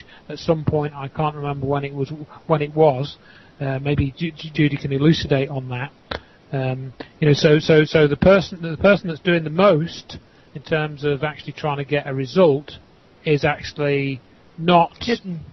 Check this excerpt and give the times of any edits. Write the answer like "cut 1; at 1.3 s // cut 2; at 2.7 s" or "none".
none